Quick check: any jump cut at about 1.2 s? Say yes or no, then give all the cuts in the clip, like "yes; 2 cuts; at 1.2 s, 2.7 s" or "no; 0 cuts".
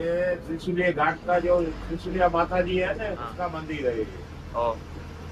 no; 1 cut; at 3.3 s